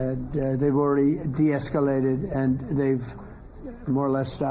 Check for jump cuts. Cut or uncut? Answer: uncut